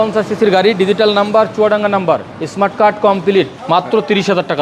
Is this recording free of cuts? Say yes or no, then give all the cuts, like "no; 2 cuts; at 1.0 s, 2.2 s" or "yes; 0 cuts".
no; 2 cuts; at 2.4 s, 3.6 s